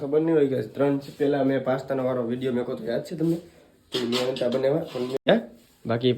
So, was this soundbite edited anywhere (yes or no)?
yes